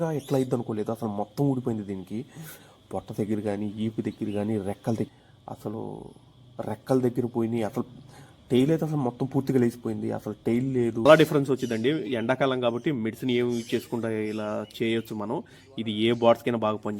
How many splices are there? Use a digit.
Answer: 2